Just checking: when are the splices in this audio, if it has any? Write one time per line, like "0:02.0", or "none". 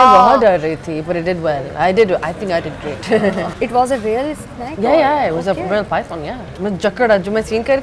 0:03.5
0:06.4